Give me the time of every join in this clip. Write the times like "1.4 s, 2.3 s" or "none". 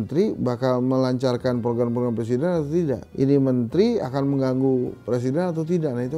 none